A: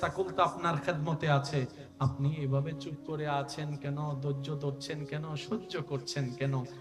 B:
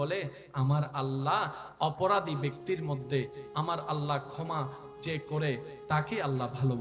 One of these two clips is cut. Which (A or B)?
B